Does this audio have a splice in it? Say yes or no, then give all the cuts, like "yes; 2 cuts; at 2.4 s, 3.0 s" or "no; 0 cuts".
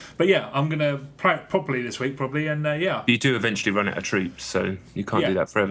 no; 0 cuts